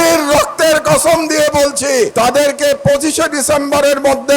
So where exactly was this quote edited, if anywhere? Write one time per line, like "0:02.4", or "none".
0:02.1